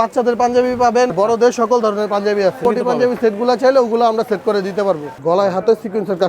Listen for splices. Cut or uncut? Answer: cut